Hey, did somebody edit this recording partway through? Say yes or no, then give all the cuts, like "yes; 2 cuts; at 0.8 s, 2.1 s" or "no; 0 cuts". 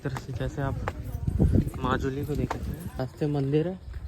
yes; 1 cut; at 3.0 s